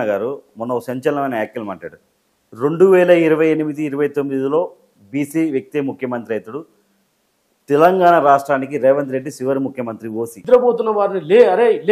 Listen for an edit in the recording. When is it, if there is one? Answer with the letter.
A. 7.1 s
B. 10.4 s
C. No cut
B